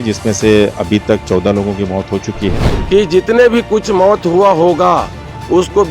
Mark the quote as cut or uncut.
cut